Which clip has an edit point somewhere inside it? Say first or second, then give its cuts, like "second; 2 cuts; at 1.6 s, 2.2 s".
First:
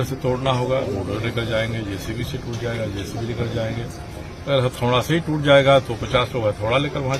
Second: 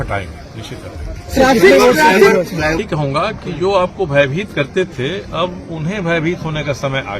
second; 1 cut; at 2.8 s